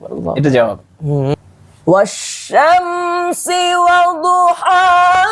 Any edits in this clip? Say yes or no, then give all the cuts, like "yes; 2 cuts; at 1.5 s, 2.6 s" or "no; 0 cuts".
yes; 1 cut; at 1.3 s